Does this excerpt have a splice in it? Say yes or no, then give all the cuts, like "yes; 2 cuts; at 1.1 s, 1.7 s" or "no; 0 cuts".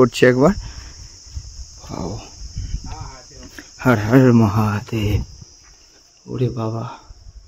no; 0 cuts